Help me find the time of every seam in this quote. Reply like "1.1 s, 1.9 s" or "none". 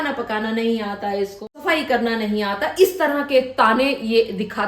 1.5 s